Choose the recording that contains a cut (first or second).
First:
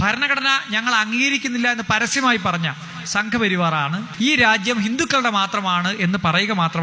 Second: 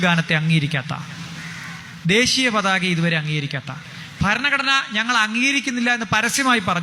first